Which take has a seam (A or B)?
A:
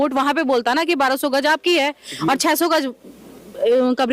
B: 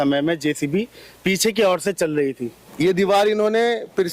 B